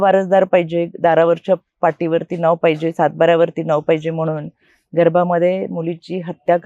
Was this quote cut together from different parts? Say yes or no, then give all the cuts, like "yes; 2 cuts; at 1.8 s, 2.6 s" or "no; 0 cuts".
no; 0 cuts